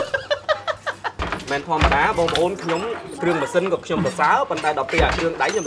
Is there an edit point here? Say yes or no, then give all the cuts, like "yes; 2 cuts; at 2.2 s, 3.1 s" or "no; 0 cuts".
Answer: yes; 1 cut; at 1.1 s